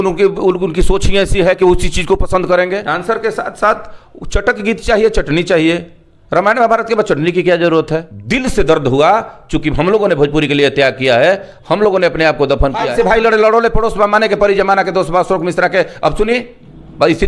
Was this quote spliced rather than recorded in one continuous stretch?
yes; 3 cuts; at 2.8 s, 8.2 s, 12.8 s

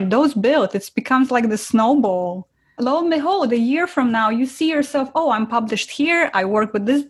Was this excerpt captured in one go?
yes; 0 cuts

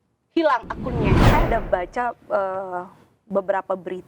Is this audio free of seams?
no; 1 cut; at 1.3 s

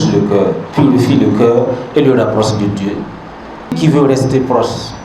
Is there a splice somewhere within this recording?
yes; 1 cut; at 3.8 s

